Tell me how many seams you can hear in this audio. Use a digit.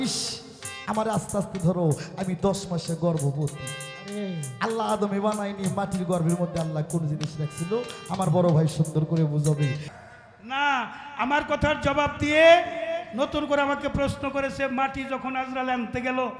1